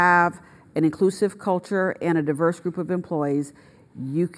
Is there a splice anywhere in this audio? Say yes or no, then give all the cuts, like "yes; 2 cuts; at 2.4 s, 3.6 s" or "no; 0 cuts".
no; 0 cuts